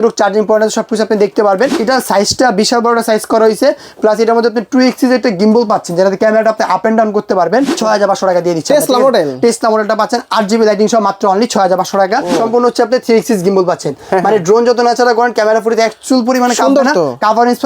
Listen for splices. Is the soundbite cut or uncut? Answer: cut